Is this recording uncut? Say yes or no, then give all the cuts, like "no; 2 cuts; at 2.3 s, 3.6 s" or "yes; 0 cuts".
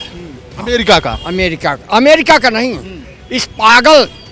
yes; 0 cuts